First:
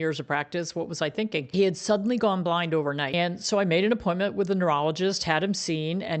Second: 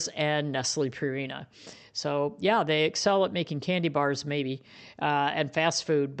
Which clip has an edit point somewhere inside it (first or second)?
first